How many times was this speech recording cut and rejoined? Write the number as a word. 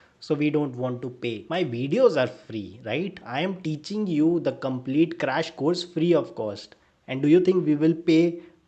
zero